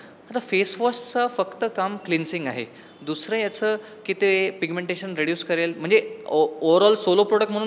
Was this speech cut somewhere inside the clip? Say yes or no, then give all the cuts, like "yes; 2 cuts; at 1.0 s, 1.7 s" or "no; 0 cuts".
no; 0 cuts